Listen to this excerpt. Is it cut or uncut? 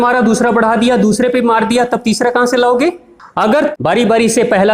cut